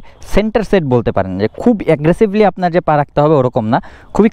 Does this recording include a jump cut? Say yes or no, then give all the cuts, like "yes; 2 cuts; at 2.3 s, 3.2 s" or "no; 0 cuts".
no; 0 cuts